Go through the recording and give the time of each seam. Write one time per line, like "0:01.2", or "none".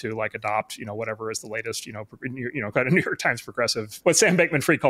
0:04.0